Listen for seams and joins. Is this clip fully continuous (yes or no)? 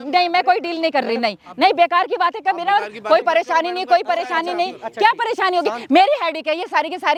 yes